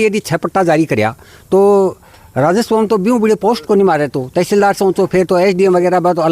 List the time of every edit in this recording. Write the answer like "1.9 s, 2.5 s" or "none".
none